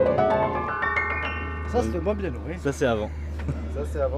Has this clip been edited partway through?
no; 0 cuts

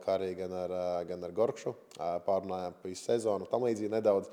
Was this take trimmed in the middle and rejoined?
no; 0 cuts

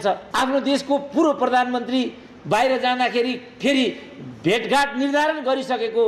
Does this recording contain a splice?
no; 0 cuts

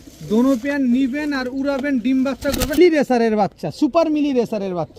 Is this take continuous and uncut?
no; 1 cut; at 2.8 s

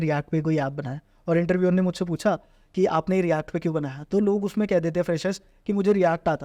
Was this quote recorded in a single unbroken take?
yes; 0 cuts

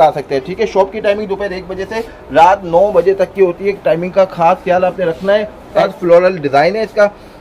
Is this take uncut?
no; 1 cut; at 5.8 s

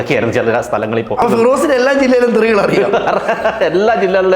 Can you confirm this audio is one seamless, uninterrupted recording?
no; 1 cut; at 1.2 s

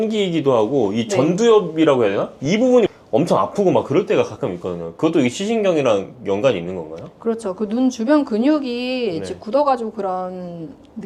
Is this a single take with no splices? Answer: yes; 0 cuts

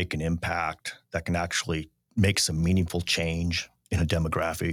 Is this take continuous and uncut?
no; 1 cut; at 2.0 s

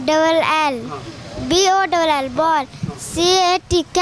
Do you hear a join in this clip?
no; 0 cuts

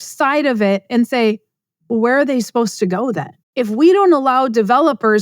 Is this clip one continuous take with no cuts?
no; 1 cut; at 3.4 s

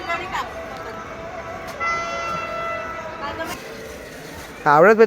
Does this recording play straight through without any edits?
no; 1 cut; at 3.5 s

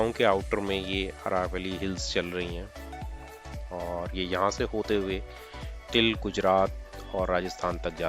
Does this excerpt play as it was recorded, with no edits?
yes; 0 cuts

